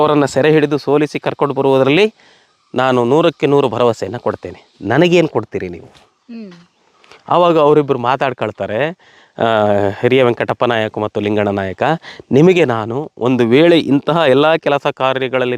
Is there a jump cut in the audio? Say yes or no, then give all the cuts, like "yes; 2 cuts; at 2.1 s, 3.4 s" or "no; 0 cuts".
no; 0 cuts